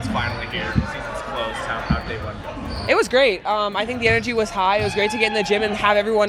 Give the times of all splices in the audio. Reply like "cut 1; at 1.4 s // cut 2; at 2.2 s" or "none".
none